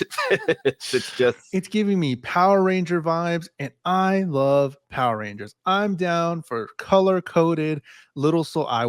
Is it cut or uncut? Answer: cut